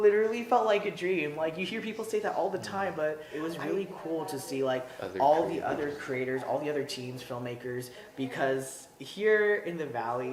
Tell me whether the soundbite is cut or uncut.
cut